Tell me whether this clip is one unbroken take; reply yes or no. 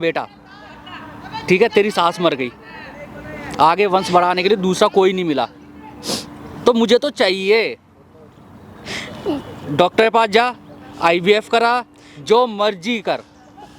yes